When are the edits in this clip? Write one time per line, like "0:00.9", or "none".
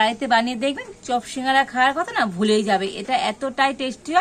none